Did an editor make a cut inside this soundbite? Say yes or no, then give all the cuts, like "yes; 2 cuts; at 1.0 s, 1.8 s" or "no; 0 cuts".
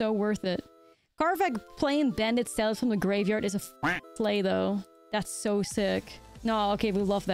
yes; 1 cut; at 6.2 s